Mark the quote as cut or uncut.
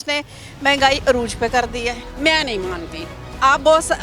cut